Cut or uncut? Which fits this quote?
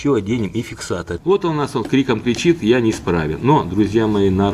cut